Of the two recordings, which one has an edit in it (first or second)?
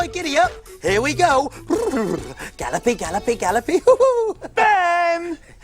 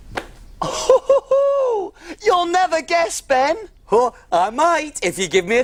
first